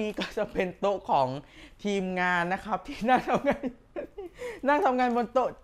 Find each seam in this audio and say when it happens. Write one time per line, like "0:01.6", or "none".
none